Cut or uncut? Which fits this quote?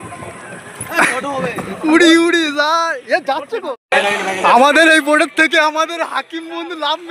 cut